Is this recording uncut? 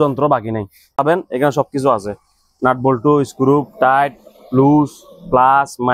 no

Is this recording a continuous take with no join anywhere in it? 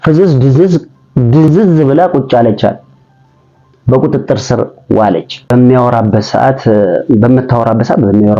no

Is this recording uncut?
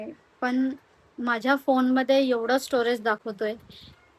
yes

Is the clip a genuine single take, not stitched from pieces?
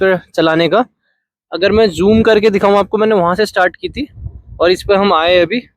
yes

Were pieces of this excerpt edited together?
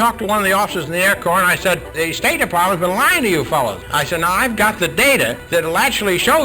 yes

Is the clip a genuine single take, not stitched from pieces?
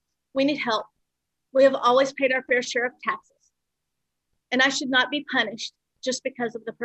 no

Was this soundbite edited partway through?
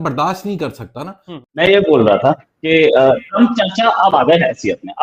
yes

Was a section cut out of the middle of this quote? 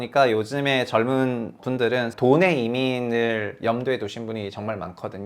yes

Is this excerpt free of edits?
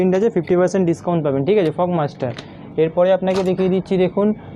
yes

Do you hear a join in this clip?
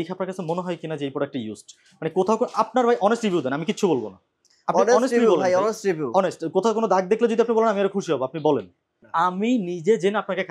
yes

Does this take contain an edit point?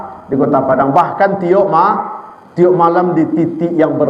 no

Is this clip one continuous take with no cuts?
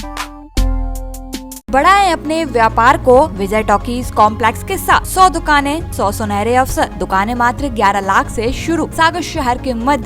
no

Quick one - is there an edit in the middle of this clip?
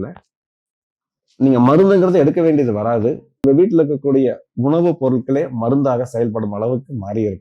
yes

